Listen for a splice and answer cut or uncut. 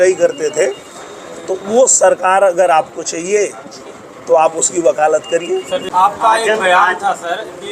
cut